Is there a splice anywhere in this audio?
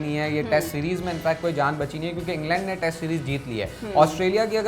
no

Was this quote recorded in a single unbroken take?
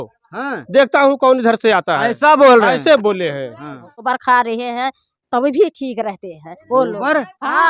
no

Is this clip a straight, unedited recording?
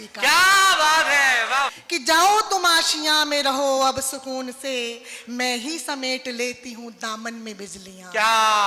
no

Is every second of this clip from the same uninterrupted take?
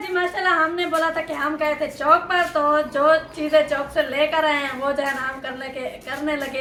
yes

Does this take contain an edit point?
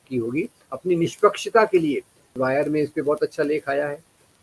yes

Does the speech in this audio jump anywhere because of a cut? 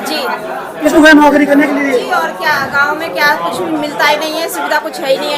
yes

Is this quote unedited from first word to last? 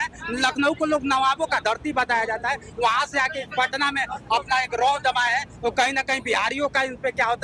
yes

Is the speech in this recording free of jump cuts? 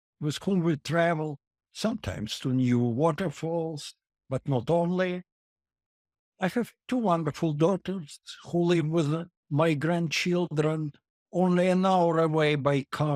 yes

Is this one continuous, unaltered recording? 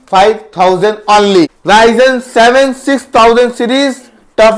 no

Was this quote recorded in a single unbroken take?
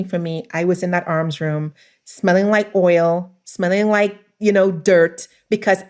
yes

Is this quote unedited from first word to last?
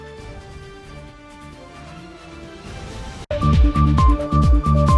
no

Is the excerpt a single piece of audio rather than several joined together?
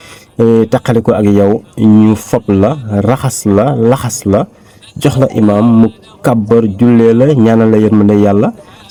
yes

